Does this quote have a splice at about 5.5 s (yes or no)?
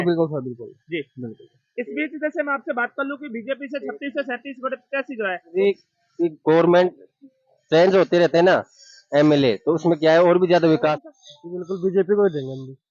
yes